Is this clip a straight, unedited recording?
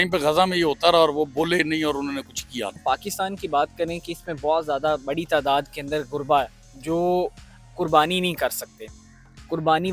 no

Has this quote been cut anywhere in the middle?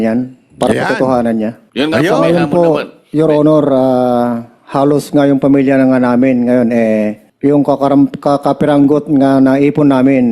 yes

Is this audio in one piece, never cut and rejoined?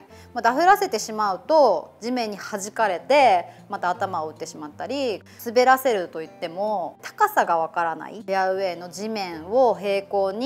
no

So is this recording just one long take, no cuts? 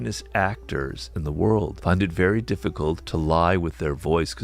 no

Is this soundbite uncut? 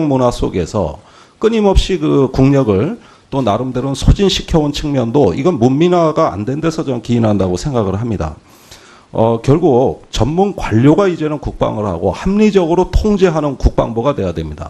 no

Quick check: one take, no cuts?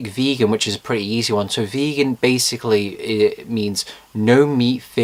yes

